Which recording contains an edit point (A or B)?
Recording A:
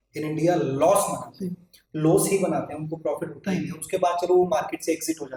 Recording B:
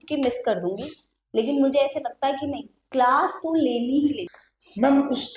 B